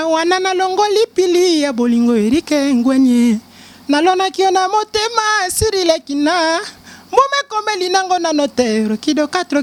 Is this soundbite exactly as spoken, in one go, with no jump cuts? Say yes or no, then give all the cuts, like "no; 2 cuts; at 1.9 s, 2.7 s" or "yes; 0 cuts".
yes; 0 cuts